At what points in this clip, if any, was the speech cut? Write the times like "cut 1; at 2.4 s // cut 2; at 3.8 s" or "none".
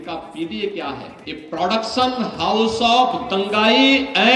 cut 1; at 1.2 s